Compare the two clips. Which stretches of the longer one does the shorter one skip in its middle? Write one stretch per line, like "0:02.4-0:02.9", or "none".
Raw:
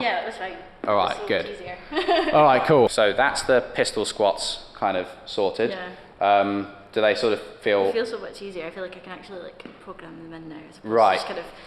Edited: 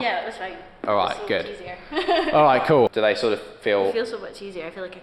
0:02.9-0:06.9